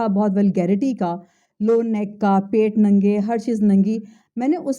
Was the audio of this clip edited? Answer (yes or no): no